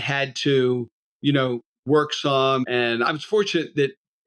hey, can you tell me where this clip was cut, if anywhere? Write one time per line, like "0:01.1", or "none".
0:02.6